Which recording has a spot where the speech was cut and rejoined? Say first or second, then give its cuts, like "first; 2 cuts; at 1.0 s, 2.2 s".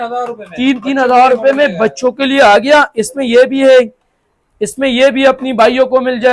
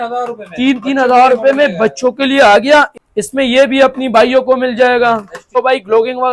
second; 2 cuts; at 3.0 s, 5.6 s